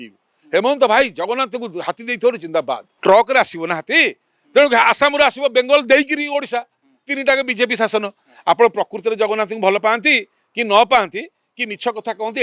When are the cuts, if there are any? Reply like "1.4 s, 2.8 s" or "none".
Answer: 2.9 s